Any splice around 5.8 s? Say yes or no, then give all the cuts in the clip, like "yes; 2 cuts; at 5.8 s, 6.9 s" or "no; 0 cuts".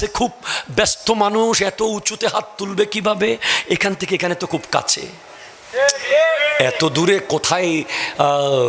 yes; 1 cut; at 5.8 s